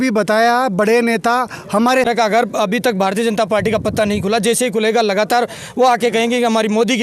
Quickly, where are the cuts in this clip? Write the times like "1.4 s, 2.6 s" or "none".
2.1 s